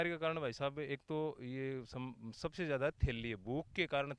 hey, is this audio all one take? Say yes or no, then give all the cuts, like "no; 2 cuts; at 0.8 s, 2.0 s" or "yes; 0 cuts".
yes; 0 cuts